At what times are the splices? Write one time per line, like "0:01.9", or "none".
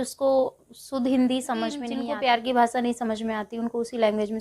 0:01.9